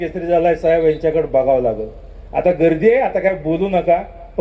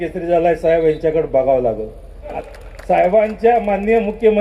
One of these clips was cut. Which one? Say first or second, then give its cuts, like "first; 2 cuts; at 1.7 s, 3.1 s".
second; 1 cut; at 2.4 s